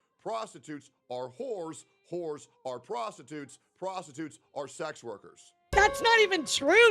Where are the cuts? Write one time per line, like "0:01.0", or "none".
0:05.7